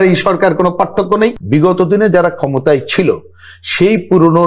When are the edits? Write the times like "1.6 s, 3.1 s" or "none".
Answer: 1.4 s